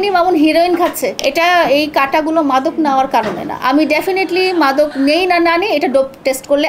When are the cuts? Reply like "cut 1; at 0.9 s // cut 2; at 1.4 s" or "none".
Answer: cut 1; at 1.2 s